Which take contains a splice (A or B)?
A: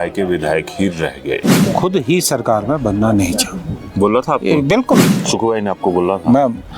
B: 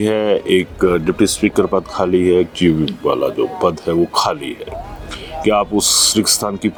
A